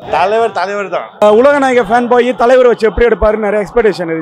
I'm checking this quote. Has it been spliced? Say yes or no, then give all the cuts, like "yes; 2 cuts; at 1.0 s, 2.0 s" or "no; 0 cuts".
yes; 1 cut; at 1.2 s